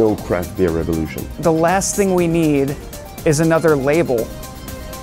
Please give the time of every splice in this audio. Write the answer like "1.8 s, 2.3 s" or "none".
1.4 s